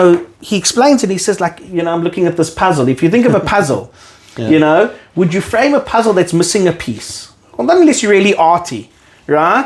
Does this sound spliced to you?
no; 0 cuts

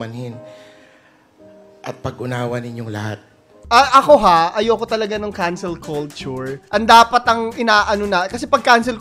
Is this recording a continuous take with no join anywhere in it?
no; 1 cut; at 3.5 s

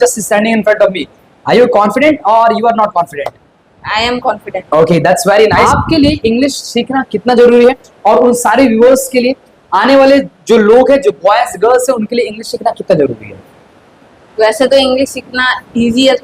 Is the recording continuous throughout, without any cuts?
no; 1 cut; at 5.6 s

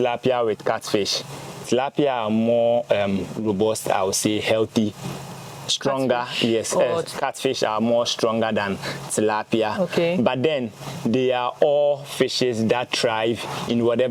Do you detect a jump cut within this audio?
no; 0 cuts

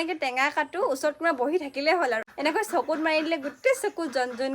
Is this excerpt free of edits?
no; 1 cut; at 2.3 s

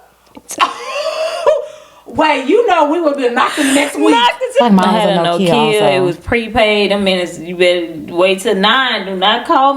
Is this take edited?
yes; 1 cut; at 4.6 s

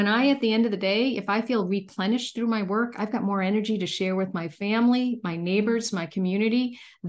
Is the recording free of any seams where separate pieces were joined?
yes; 0 cuts

